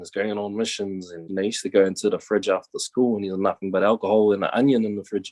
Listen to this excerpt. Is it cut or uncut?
cut